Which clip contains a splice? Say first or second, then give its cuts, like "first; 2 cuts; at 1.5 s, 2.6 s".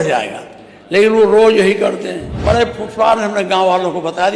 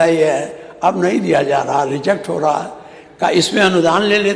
first; 1 cut; at 2.3 s